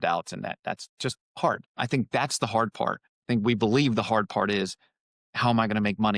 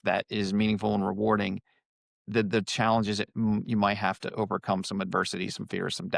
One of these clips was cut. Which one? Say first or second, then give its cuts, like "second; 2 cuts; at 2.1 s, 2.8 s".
first; 2 cuts; at 1.7 s, 3.1 s